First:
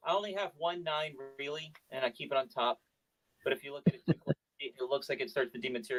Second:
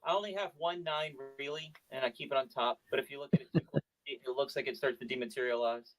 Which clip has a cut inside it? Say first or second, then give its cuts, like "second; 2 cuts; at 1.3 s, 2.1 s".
second; 1 cut; at 2.8 s